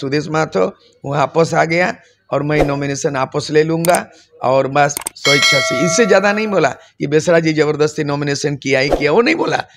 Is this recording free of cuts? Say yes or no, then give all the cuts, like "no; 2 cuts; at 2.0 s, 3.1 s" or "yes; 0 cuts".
yes; 0 cuts